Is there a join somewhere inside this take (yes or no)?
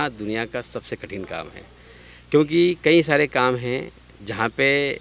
no